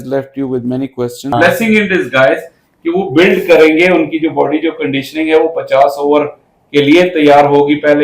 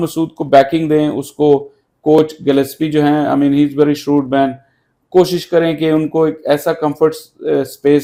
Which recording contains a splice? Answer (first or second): first